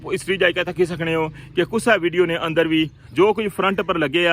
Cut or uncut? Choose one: uncut